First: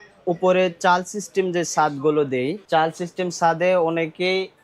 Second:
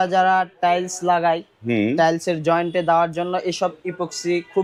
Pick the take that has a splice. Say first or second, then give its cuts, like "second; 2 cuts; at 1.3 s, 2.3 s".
first; 1 cut; at 2.6 s